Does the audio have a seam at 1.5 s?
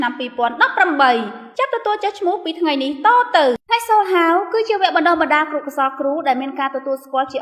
no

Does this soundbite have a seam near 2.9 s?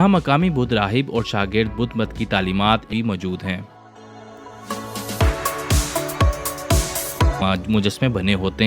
yes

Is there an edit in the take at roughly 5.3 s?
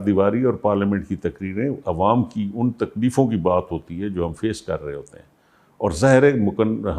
no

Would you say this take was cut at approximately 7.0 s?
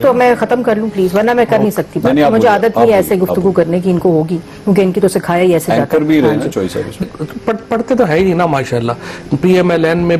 yes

